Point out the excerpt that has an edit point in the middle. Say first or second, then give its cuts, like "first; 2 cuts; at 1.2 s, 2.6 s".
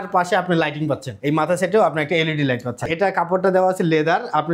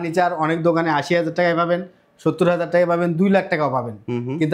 first; 2 cuts; at 1.1 s, 2.8 s